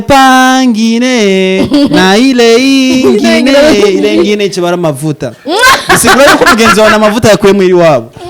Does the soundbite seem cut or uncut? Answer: uncut